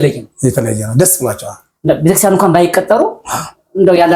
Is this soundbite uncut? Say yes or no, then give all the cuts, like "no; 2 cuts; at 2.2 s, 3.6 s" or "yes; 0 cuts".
yes; 0 cuts